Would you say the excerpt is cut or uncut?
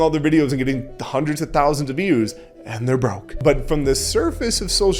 cut